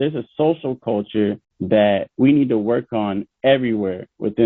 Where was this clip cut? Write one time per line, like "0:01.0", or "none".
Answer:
none